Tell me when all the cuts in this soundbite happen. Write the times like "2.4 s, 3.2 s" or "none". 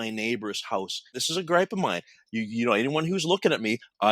1.3 s